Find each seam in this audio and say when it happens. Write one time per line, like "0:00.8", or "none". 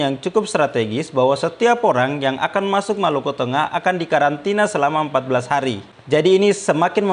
0:05.9